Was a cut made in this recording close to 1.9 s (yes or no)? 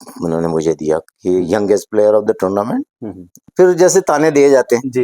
no